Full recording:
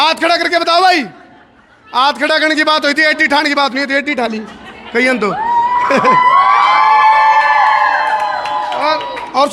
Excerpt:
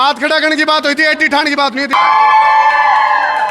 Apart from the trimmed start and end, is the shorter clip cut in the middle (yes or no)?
yes